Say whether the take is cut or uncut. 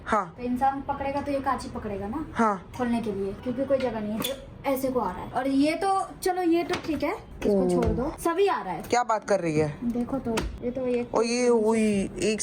cut